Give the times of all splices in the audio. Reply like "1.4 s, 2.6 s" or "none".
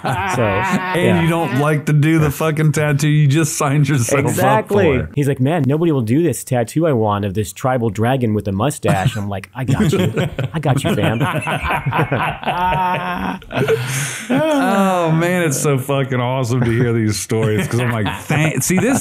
5.1 s